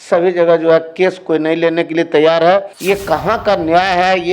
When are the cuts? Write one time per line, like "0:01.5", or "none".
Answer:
0:02.7